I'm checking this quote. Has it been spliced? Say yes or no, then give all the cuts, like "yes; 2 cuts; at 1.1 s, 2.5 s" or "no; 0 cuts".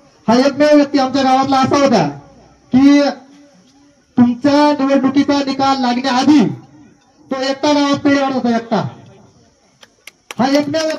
no; 0 cuts